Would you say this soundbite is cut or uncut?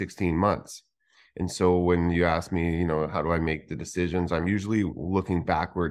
uncut